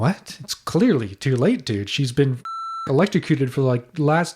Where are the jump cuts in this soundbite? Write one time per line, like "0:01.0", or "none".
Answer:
0:02.8